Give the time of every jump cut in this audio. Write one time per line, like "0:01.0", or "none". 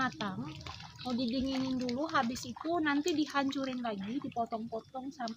none